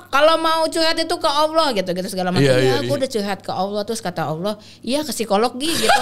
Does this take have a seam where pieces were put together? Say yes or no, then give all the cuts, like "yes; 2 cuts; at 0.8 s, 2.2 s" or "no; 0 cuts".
yes; 1 cut; at 2.8 s